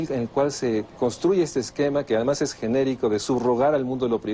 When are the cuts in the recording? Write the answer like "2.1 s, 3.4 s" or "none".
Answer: none